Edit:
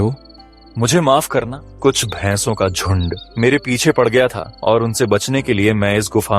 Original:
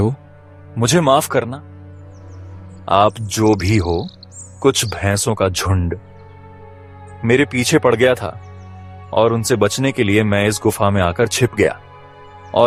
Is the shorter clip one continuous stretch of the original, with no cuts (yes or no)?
no